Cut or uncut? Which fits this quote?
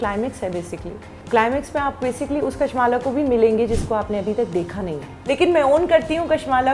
cut